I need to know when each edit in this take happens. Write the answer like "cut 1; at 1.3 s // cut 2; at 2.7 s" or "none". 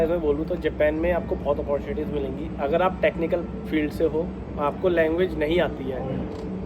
none